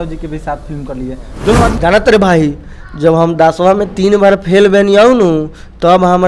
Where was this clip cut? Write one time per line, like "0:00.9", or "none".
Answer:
0:01.8